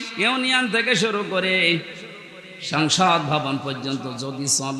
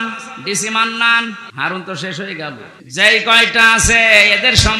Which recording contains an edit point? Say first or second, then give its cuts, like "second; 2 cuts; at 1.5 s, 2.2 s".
second; 2 cuts; at 1.5 s, 2.7 s